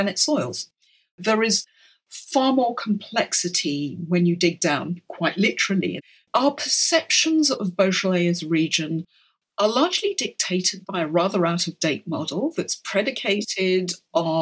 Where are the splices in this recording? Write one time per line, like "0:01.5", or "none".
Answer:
0:01.2
0:05.9

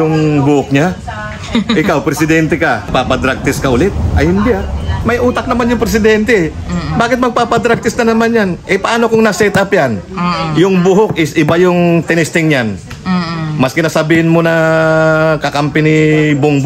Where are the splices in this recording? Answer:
0:02.9

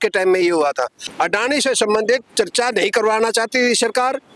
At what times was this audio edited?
0:01.0

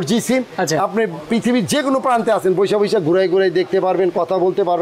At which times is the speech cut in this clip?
none

